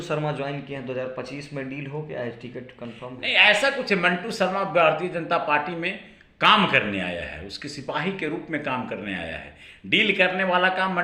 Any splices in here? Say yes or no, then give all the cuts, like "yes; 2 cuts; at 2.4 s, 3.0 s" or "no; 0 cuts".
no; 0 cuts